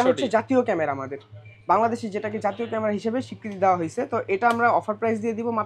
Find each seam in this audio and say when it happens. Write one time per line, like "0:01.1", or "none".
none